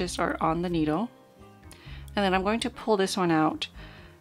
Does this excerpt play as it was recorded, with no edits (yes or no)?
yes